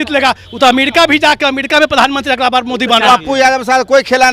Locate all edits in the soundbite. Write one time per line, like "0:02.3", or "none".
0:03.1

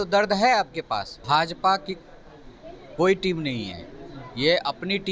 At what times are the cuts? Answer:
0:01.1

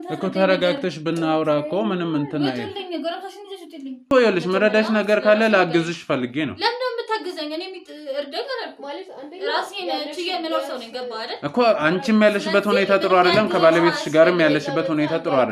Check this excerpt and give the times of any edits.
0:04.1

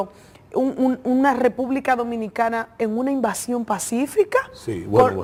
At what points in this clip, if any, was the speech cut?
none

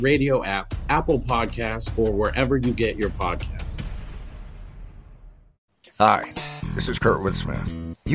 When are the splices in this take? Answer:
0:05.5

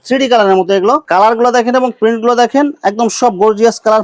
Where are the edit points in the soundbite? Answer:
0:01.0

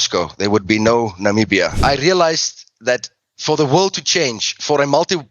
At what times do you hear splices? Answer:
0:01.8

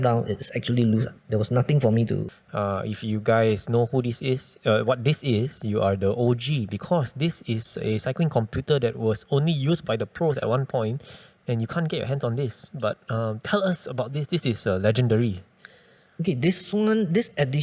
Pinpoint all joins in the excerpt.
0:02.3

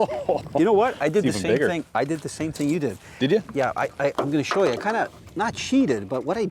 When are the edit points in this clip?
none

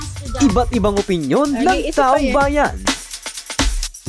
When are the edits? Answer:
0:02.8

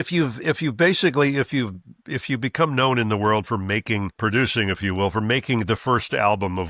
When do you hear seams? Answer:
0:04.1

